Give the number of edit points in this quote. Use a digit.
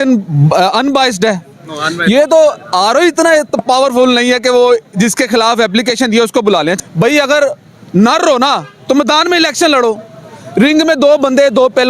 1